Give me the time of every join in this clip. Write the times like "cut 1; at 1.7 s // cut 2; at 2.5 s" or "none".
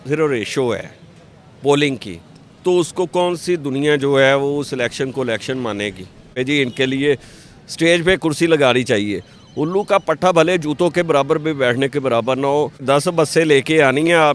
cut 1; at 6.4 s // cut 2; at 12.8 s